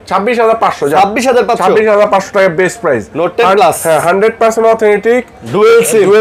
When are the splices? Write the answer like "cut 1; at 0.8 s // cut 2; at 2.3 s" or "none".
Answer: none